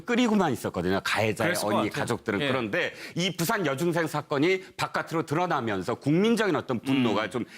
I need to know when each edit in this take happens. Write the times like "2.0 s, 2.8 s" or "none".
3.0 s